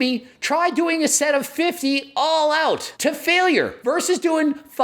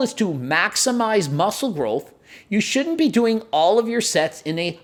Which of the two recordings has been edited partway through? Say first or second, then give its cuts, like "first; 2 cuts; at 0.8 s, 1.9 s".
first; 2 cuts; at 2.9 s, 3.8 s